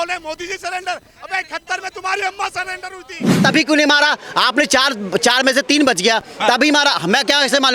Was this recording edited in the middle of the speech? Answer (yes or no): yes